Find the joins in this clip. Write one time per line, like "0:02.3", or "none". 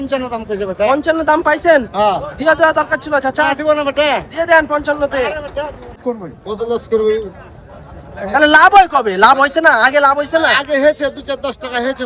0:06.0